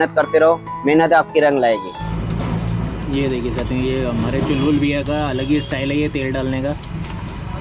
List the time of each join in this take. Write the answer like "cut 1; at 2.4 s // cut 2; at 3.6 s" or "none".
cut 1; at 2.1 s